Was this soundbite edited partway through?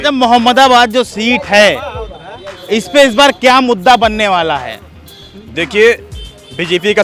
no; 0 cuts

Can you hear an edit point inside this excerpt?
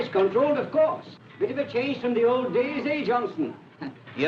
yes; 1 cut; at 3.1 s

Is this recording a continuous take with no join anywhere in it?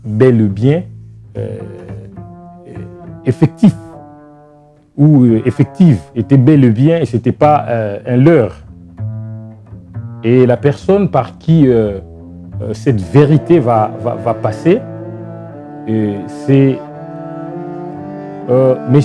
yes; 0 cuts

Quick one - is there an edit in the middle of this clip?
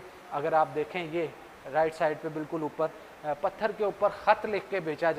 no; 0 cuts

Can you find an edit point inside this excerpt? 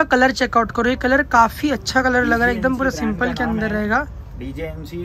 no; 0 cuts

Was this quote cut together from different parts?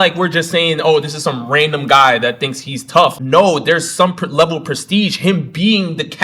no; 0 cuts

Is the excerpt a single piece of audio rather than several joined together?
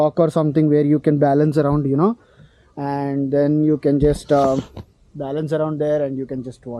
yes; 0 cuts

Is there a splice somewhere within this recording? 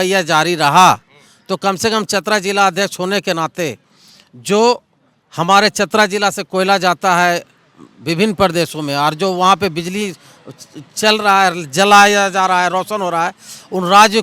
no; 0 cuts

